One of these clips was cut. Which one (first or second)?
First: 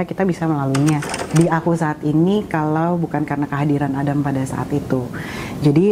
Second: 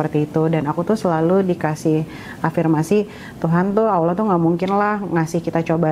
first